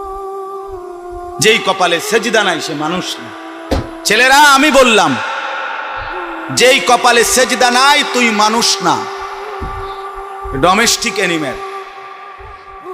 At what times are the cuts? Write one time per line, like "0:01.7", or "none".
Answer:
0:01.4